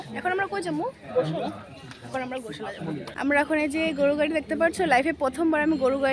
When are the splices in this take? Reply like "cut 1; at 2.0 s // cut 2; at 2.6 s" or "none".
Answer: cut 1; at 3.0 s